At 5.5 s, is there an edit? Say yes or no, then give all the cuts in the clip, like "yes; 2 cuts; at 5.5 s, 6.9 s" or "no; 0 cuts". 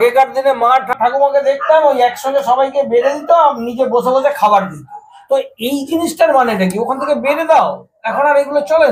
no; 1 cut; at 0.9 s